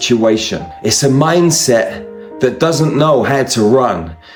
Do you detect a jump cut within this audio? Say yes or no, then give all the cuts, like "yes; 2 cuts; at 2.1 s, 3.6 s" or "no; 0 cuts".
no; 0 cuts